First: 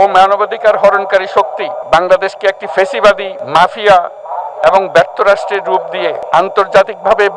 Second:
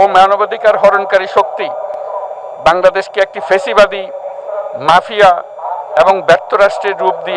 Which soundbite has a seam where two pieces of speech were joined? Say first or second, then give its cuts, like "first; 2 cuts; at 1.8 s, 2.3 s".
first; 3 cuts; at 1.8 s, 3.4 s, 6.2 s